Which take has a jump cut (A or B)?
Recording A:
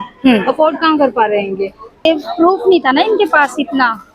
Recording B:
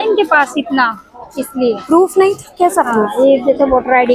A